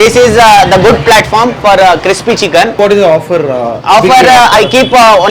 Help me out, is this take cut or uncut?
cut